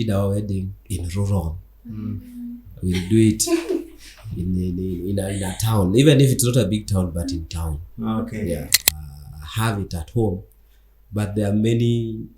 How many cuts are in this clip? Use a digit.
1